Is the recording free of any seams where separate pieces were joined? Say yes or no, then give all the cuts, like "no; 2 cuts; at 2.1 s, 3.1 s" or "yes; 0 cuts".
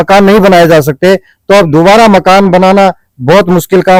yes; 0 cuts